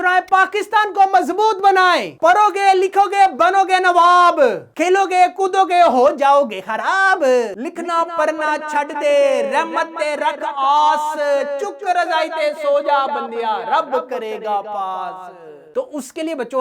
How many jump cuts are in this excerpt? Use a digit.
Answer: 3